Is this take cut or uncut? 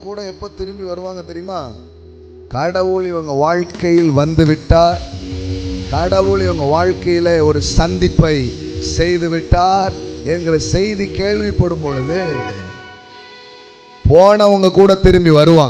uncut